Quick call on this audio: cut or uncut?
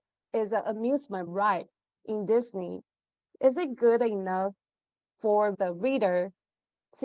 uncut